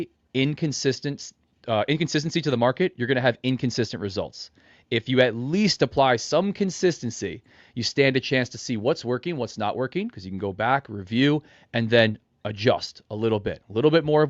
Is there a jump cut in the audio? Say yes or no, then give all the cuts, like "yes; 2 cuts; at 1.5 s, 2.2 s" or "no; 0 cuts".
no; 0 cuts